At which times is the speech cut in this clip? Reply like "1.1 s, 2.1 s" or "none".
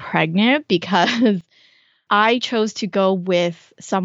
2.0 s